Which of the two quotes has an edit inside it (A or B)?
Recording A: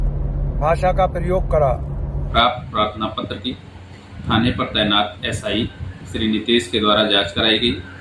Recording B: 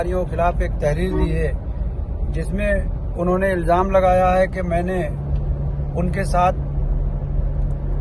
A